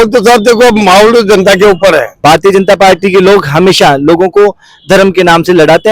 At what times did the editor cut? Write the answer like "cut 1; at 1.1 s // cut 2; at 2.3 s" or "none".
cut 1; at 2.1 s